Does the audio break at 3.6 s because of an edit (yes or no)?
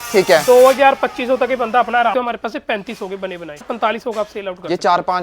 yes